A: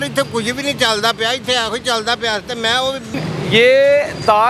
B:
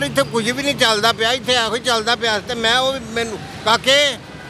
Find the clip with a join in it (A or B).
A